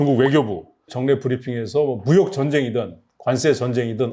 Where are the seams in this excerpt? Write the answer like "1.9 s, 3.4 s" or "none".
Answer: 0.9 s